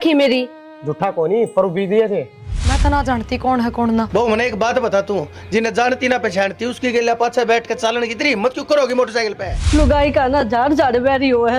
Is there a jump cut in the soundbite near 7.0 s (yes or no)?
no